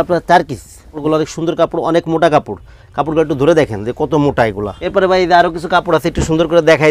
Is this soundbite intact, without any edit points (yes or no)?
no